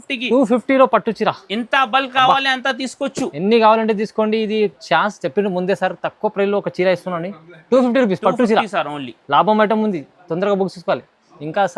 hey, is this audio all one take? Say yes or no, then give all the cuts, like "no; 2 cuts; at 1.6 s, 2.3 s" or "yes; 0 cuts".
yes; 0 cuts